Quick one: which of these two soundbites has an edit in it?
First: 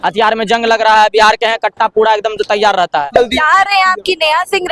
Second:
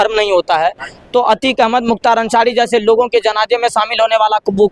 first; 1 cut; at 3.2 s

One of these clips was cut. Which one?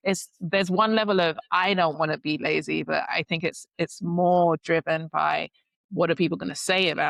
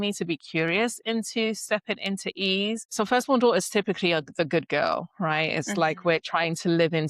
second; 1 cut; at 2.8 s

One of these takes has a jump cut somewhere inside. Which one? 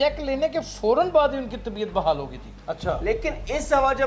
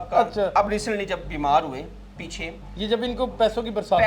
first; 1 cut; at 2.5 s

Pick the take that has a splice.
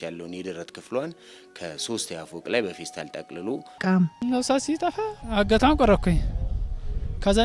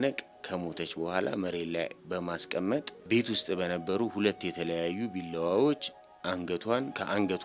first; 1 cut; at 3.7 s

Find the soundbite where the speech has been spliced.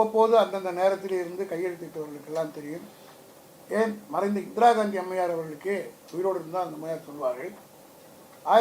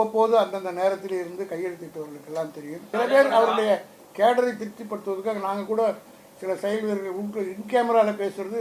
second; 1 cut; at 2.7 s

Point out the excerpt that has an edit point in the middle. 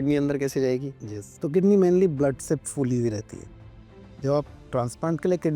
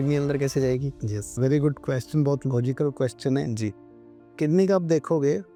first; 1 cut; at 1.3 s

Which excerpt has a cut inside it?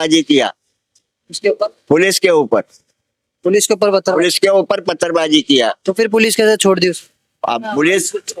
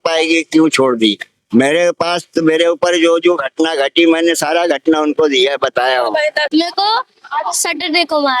second; 1 cut; at 6.5 s

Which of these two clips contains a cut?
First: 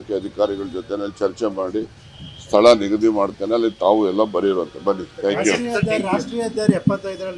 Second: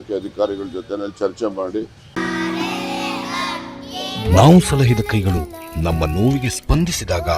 first; 1 cut; at 2.1 s

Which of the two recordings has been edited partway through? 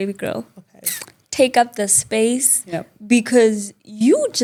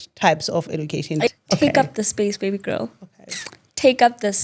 second; 1 cut; at 1.3 s

